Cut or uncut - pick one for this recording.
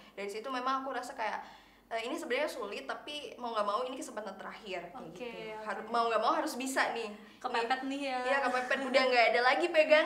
uncut